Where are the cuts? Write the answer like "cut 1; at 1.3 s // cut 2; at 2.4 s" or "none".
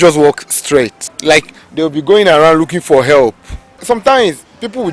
cut 1; at 1.1 s // cut 2; at 3.7 s